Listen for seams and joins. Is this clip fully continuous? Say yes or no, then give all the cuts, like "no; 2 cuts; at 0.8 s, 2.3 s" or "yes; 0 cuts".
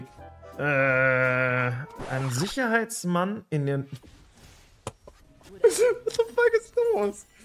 yes; 0 cuts